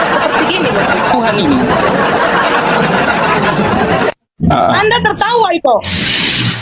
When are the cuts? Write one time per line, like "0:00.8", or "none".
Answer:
0:01.9